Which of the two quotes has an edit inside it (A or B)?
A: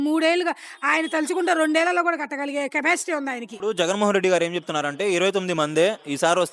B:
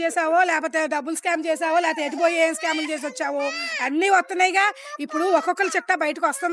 A